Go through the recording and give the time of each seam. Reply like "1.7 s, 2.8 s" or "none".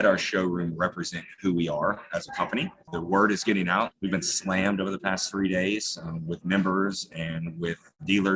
2.8 s, 3.9 s